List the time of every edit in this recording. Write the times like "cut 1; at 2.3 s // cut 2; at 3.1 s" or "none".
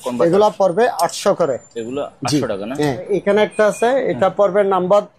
cut 1; at 3.1 s